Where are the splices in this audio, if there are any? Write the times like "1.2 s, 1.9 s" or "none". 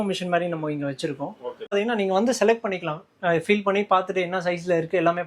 1.7 s